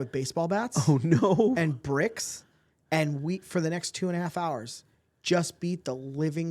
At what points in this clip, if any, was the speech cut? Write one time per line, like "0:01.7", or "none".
none